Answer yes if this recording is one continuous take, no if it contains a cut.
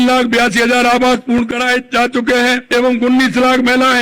no